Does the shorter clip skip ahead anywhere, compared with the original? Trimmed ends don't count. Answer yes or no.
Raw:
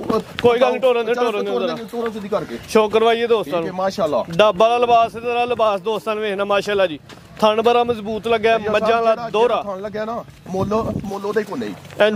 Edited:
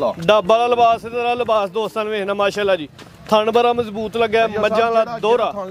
no